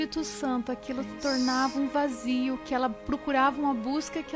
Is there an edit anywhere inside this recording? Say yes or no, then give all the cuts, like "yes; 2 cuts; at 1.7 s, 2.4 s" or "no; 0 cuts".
no; 0 cuts